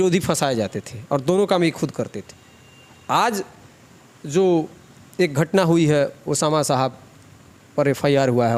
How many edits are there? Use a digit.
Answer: 0